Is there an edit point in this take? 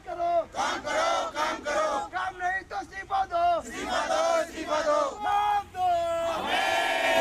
yes; 1 cut; at 5.2 s

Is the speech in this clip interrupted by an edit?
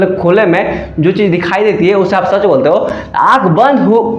no; 0 cuts

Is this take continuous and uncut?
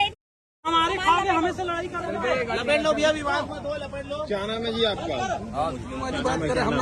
yes; 0 cuts

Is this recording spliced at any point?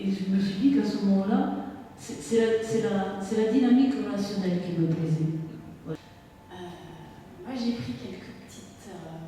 yes; 1 cut; at 6.0 s

